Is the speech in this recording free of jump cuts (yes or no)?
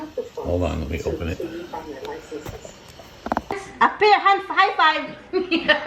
no